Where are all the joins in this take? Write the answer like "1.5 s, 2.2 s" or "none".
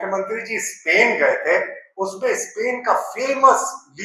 none